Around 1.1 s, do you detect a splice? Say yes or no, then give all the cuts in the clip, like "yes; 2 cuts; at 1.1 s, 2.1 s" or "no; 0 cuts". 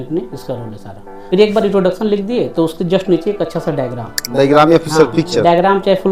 yes; 1 cut; at 1.1 s